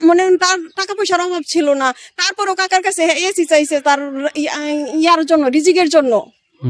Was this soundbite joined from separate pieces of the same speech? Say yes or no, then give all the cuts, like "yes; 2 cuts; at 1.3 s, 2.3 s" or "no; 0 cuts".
no; 0 cuts